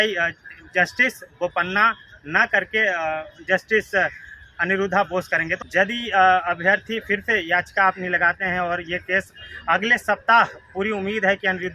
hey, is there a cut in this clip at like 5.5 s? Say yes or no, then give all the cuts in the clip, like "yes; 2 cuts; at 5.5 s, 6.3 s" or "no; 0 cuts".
yes; 1 cut; at 5.5 s